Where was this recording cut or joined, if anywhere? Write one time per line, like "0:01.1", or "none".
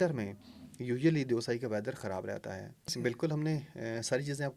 0:02.9